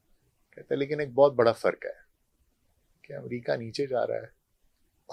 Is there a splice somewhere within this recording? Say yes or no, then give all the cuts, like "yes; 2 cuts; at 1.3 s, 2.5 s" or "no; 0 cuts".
no; 0 cuts